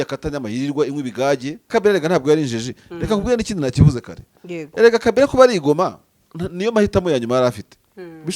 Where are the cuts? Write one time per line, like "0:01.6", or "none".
0:01.7